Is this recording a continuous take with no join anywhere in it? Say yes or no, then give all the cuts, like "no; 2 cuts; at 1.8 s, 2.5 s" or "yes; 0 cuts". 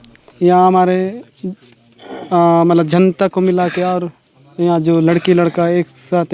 yes; 0 cuts